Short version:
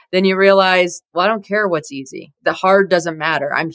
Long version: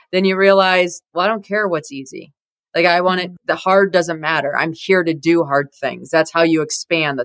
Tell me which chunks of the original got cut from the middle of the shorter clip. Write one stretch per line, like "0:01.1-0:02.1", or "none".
0:02.3-0:03.3